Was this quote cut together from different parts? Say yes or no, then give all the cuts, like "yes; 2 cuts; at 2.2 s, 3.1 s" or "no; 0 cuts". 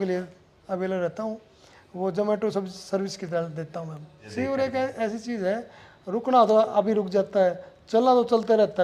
yes; 1 cut; at 4.2 s